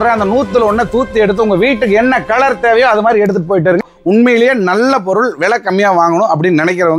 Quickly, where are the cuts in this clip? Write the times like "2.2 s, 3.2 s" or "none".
3.9 s